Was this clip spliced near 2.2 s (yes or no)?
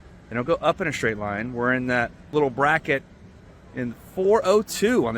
yes